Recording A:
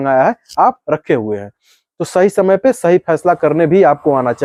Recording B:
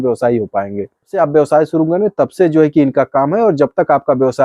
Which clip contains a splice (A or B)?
B